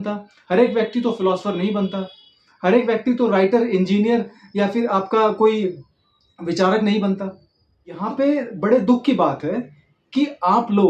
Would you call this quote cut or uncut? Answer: cut